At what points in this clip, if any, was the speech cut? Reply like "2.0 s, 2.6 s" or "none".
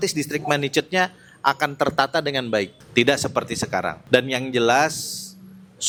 none